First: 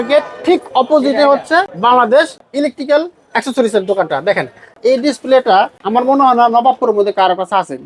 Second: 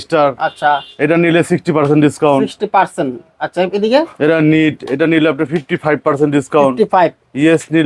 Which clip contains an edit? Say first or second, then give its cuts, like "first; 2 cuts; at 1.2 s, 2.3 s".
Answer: first; 4 cuts; at 1.7 s, 2.4 s, 4.8 s, 5.8 s